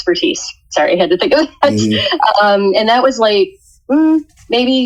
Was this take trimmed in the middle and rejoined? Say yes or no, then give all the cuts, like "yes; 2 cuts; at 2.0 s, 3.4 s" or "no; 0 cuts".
no; 0 cuts